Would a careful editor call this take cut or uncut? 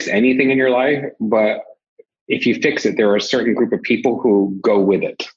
uncut